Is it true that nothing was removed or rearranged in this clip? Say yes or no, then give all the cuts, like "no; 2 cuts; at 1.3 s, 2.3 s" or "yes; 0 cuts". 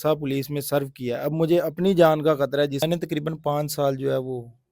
no; 1 cut; at 2.8 s